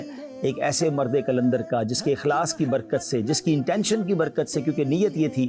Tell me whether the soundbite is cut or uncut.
uncut